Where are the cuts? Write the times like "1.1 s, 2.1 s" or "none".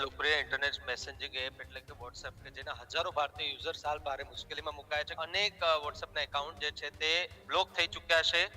5.1 s